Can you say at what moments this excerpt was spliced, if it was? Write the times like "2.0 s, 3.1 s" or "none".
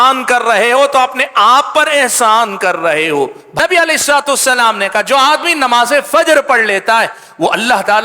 3.4 s